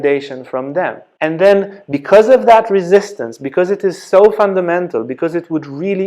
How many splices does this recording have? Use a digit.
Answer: 1